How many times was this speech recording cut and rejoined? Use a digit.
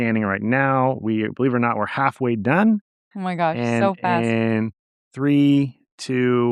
0